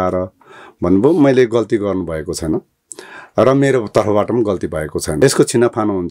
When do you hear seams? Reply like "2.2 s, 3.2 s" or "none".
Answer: none